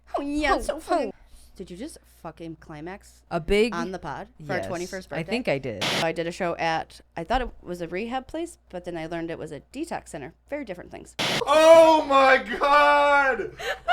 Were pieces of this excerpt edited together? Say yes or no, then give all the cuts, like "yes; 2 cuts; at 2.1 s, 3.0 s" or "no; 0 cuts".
yes; 3 cuts; at 1.1 s, 5.8 s, 11.3 s